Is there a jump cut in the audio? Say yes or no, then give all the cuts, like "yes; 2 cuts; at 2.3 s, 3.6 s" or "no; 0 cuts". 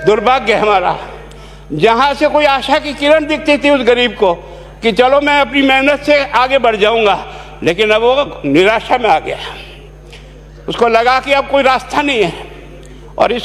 no; 0 cuts